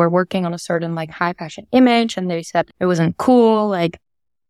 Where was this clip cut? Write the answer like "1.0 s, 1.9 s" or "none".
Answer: 2.7 s